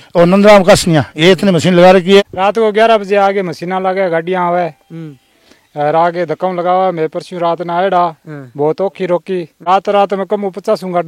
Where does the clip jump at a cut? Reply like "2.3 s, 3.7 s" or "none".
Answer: 2.2 s, 9.5 s